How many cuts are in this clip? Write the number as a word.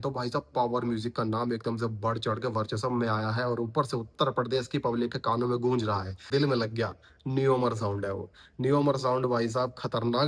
one